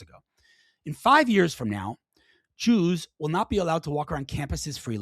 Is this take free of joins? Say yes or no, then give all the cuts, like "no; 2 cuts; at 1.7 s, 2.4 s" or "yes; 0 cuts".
yes; 0 cuts